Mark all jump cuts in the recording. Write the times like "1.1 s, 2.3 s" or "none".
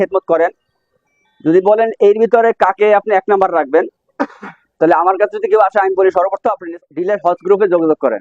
6.6 s